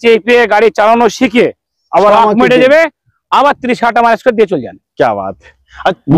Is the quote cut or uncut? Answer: uncut